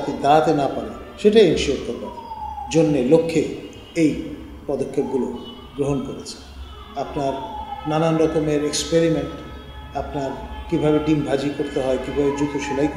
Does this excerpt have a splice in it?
no; 0 cuts

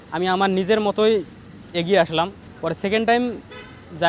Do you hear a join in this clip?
no; 0 cuts

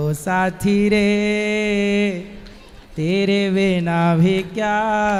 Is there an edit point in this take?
no; 0 cuts

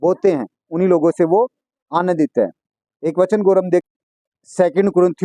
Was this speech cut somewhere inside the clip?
yes; 1 cut; at 3.9 s

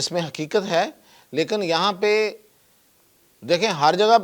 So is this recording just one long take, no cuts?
yes; 0 cuts

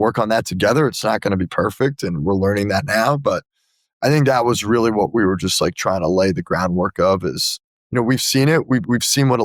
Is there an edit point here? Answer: no; 0 cuts

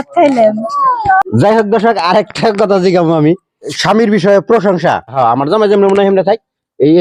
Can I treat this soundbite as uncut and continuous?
yes; 0 cuts

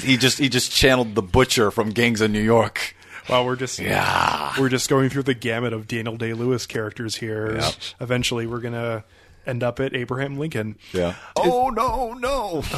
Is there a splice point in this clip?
yes; 1 cut; at 11.4 s

